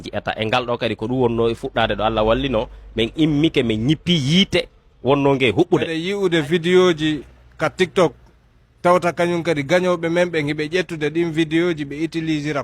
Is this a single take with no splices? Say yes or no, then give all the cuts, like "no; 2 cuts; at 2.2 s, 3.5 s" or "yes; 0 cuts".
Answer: no; 1 cut; at 6.0 s